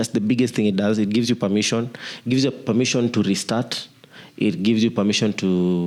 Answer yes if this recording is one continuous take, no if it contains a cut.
yes